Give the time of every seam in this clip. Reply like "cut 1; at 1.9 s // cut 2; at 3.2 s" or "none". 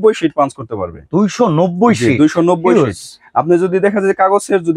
none